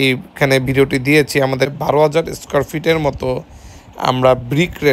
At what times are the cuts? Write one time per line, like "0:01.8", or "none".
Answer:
0:01.7